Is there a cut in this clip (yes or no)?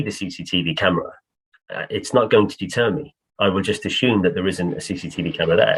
no